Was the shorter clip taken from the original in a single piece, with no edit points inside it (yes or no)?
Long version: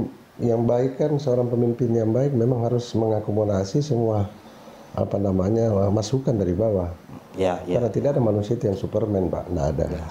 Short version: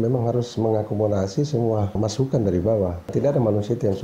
no